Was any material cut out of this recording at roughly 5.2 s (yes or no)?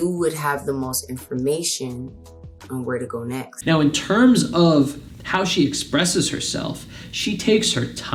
no